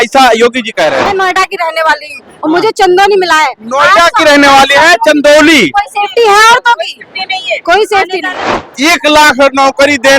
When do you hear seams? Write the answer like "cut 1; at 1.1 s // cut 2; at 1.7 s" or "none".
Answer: cut 1; at 1.1 s // cut 2; at 8.7 s